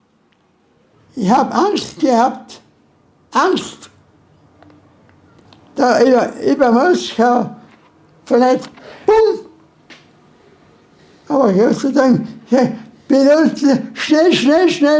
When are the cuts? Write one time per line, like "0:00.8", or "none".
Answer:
0:00.9
0:05.4
0:11.0